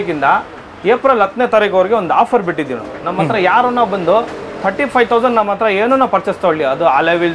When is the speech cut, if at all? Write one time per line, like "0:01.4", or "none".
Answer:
none